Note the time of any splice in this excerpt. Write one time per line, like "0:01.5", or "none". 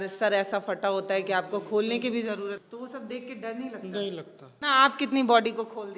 0:02.6
0:04.4